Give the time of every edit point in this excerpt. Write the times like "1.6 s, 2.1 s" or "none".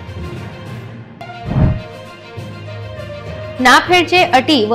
none